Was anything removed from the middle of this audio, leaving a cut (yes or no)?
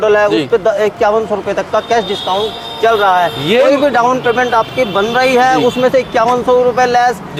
no